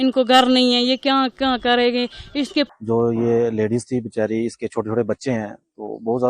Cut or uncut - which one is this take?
cut